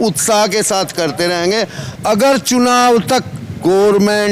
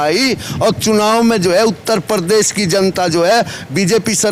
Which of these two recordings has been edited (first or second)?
first